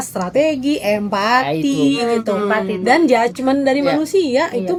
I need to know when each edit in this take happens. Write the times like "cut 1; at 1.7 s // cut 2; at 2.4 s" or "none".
none